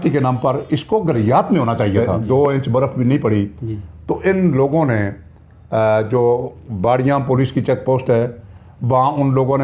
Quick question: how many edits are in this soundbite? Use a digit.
1